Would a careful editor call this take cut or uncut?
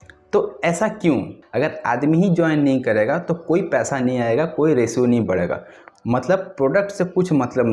cut